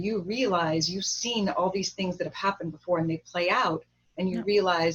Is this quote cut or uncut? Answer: uncut